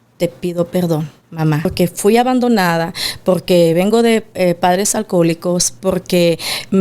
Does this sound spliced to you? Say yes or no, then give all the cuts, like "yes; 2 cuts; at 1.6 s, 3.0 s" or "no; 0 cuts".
yes; 1 cut; at 1.7 s